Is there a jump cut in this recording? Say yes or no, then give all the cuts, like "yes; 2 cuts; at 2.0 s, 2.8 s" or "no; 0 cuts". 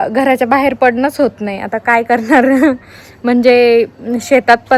no; 0 cuts